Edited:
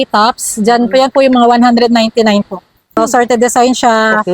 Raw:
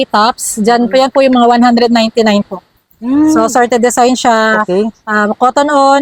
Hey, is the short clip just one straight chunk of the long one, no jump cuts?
no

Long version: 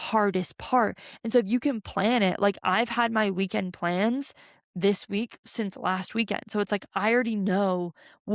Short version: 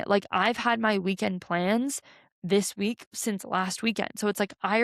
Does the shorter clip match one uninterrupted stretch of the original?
yes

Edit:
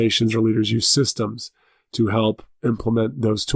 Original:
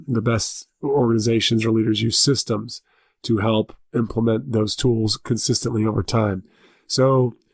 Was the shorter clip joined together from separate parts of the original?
no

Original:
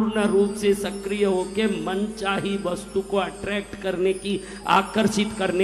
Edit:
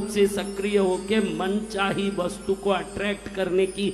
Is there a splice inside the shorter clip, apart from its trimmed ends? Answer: no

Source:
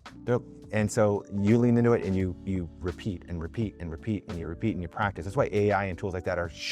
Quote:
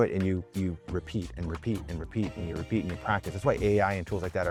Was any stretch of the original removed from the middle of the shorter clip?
no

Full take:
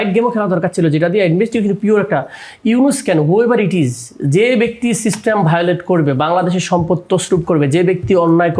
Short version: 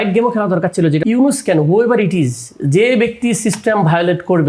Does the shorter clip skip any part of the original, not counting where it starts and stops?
yes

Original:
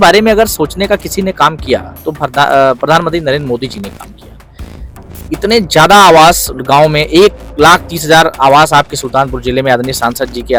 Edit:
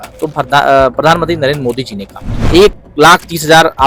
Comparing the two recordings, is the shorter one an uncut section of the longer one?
no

